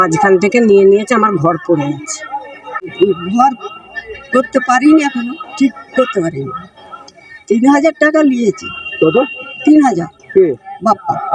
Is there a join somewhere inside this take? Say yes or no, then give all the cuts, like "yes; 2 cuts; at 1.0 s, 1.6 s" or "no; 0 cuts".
yes; 1 cut; at 2.9 s